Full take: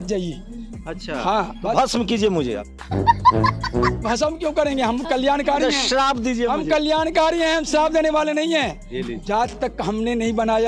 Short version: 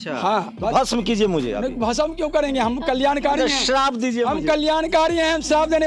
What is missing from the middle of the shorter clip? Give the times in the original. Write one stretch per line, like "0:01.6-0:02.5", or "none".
0:02.8-0:04.0